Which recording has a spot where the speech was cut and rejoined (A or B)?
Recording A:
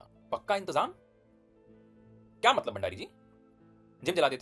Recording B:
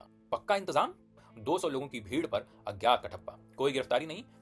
B